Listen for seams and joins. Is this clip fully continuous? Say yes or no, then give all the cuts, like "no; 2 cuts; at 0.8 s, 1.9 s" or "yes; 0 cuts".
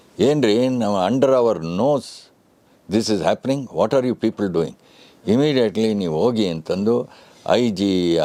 yes; 0 cuts